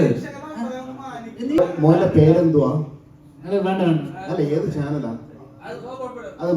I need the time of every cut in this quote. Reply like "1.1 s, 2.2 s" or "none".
1.6 s